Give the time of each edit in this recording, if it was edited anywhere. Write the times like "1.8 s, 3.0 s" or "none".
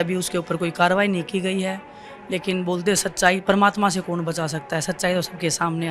none